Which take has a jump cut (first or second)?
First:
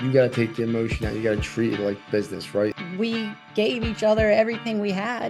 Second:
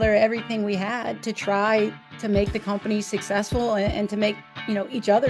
first